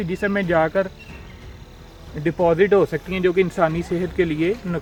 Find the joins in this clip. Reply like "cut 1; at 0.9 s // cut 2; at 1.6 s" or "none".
none